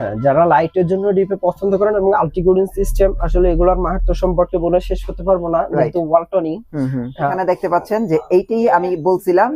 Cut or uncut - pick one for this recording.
cut